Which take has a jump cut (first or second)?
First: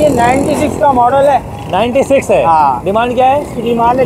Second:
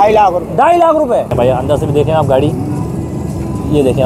second